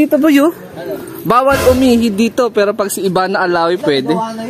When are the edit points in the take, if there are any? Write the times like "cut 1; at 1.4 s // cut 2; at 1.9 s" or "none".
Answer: none